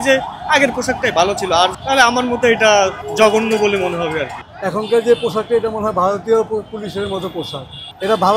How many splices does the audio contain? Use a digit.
3